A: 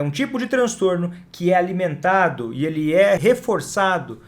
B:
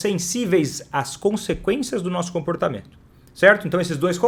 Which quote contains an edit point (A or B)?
A